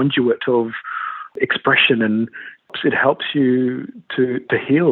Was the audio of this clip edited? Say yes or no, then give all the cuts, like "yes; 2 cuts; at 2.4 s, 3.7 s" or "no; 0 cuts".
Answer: yes; 2 cuts; at 1.3 s, 2.7 s